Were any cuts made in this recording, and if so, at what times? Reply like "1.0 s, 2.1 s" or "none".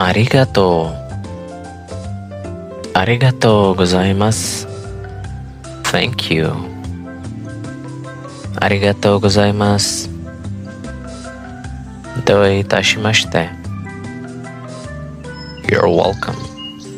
4.3 s, 5.8 s, 6.6 s, 8.2 s, 10.3 s, 12.2 s, 13.5 s, 15.4 s